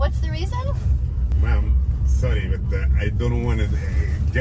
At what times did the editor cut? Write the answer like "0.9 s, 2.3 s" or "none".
1.3 s